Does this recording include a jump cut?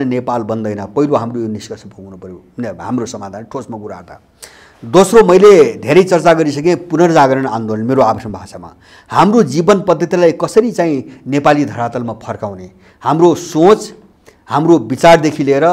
no; 0 cuts

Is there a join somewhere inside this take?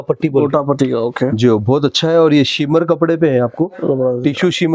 no; 0 cuts

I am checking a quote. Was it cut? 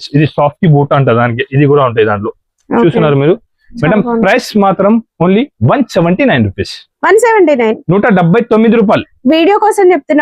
no; 0 cuts

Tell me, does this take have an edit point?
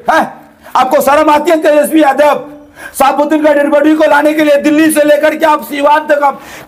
no; 0 cuts

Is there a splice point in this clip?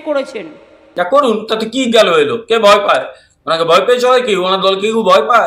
no; 0 cuts

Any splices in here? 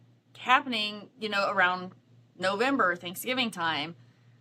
no; 0 cuts

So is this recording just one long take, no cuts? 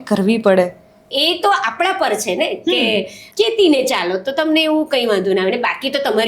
no; 2 cuts; at 1.1 s, 3.2 s

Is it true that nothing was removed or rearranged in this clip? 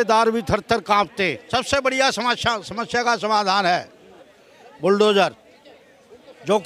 no; 1 cut; at 1.4 s

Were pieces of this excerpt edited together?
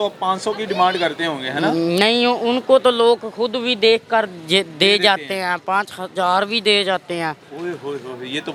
no; 0 cuts

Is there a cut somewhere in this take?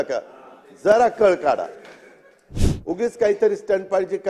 yes; 1 cut; at 2.4 s

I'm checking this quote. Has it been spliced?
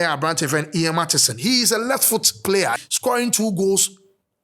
yes; 1 cut; at 2.8 s

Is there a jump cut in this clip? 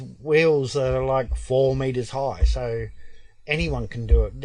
no; 0 cuts

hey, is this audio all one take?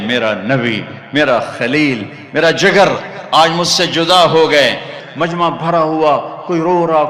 no; 1 cut; at 5.0 s

